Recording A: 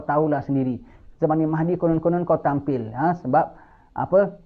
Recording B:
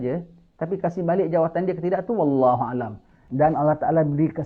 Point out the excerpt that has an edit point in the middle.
B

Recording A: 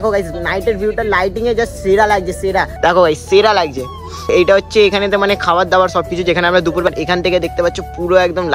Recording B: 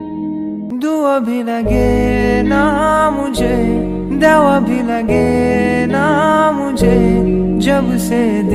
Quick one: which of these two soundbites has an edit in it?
A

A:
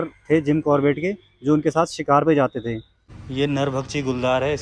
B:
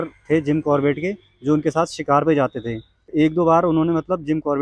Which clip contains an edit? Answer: A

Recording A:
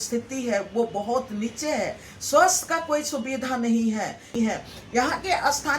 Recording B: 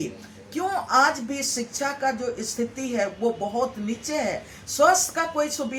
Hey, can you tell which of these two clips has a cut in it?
A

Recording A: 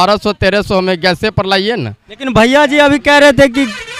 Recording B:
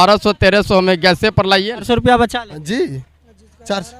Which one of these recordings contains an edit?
B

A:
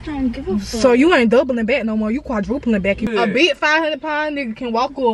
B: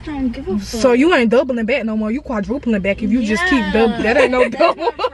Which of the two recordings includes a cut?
A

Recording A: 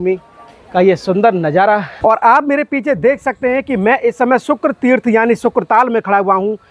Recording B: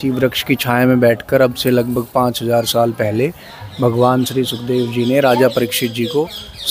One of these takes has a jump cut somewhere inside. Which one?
A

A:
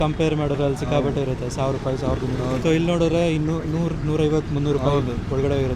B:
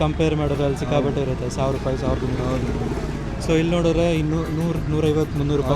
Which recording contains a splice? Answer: A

